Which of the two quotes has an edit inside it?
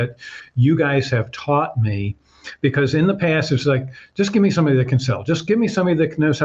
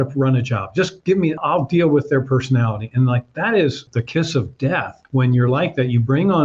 second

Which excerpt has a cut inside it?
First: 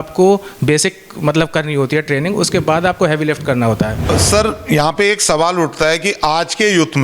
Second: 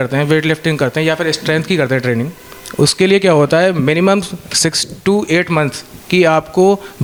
first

